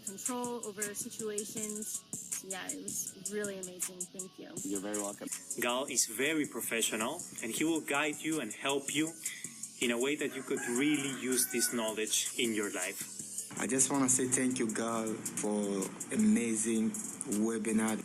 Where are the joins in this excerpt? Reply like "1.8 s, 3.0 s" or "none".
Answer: none